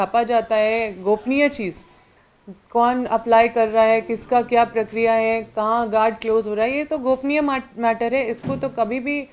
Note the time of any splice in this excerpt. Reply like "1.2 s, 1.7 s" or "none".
none